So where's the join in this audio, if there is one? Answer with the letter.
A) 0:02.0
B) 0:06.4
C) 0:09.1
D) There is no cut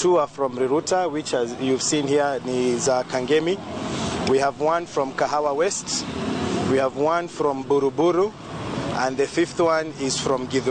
D